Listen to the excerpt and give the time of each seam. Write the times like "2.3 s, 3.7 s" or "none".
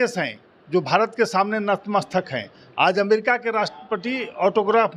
none